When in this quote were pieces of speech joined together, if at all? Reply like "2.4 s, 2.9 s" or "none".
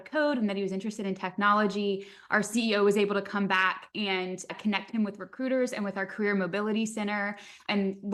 none